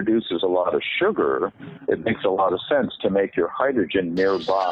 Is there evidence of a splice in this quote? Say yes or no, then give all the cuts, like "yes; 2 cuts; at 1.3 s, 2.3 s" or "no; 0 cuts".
no; 0 cuts